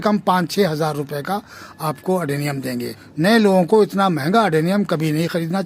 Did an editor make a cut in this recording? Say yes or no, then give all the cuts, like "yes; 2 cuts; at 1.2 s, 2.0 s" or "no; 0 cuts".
yes; 1 cut; at 3.1 s